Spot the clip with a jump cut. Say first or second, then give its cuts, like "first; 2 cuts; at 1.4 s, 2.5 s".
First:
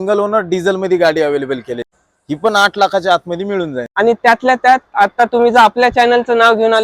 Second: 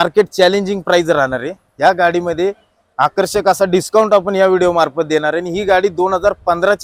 first; 2 cuts; at 2.0 s, 3.8 s